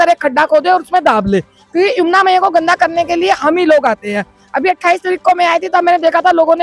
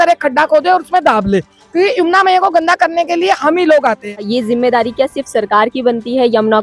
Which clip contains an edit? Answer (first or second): second